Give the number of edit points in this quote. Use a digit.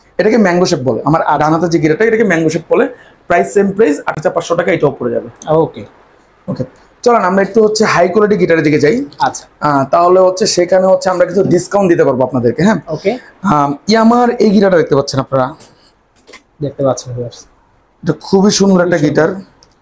0